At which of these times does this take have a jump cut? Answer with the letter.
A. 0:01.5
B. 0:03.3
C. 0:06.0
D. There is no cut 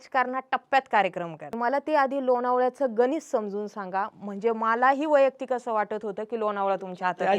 A